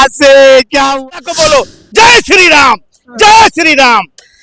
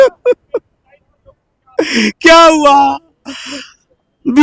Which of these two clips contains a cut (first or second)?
first